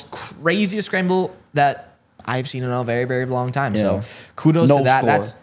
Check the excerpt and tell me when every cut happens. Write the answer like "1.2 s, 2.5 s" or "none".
none